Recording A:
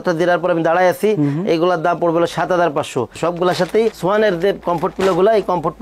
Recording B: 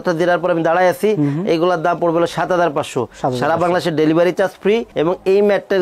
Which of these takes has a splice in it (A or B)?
A